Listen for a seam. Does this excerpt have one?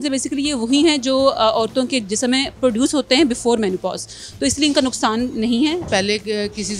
yes; 1 cut; at 5.8 s

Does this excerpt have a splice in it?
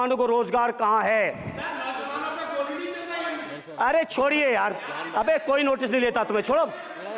no; 0 cuts

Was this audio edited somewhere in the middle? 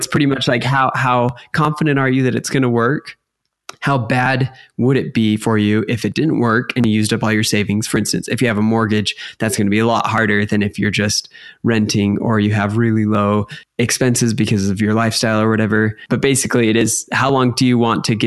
no; 0 cuts

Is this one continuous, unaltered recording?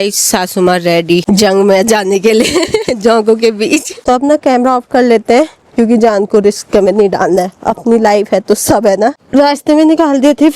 no; 2 cuts; at 4.0 s, 9.1 s

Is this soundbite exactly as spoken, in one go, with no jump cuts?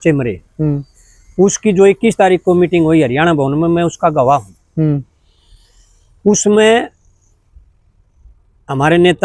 yes; 0 cuts

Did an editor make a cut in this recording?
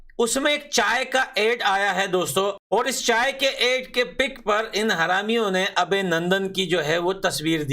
yes; 1 cut; at 2.6 s

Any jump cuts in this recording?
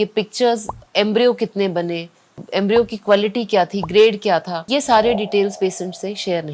no; 0 cuts

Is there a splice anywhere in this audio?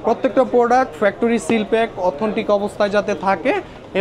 no; 0 cuts

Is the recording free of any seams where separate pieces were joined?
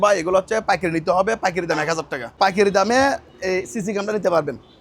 no; 1 cut; at 2.4 s

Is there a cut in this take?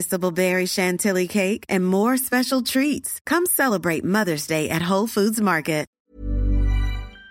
yes; 1 cut; at 5.9 s

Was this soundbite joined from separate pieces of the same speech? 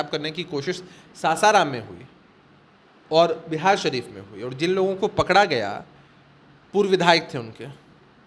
no; 0 cuts

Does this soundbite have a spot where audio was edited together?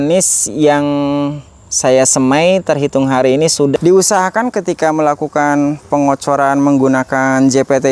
yes; 1 cut; at 3.7 s

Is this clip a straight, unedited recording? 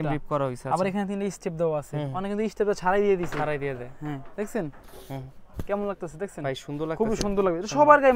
yes; 0 cuts

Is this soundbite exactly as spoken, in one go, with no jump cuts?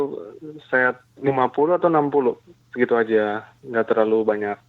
yes; 0 cuts

